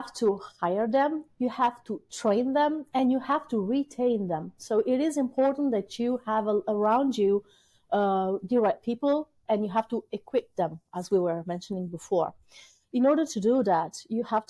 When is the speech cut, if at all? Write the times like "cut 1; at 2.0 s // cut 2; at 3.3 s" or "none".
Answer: none

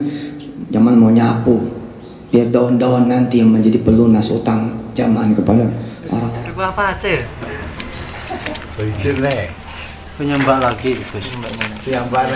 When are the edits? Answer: cut 1; at 6.3 s

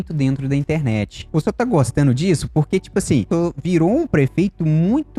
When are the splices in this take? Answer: cut 1; at 1.2 s // cut 2; at 3.3 s

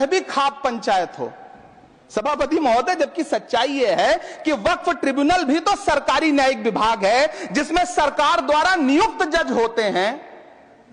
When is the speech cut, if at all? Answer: none

